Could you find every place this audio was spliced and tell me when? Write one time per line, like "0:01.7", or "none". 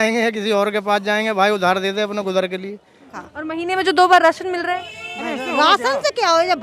0:03.1

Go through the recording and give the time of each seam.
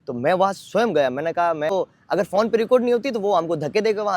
0:01.7

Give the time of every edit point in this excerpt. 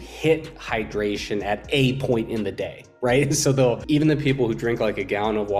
0:03.8

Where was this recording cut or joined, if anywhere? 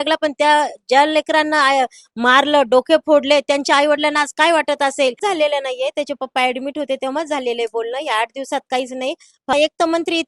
0:05.2
0:09.5

